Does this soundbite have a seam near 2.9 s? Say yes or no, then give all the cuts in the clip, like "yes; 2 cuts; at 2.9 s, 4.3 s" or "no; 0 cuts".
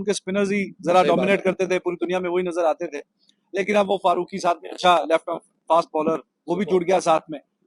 no; 0 cuts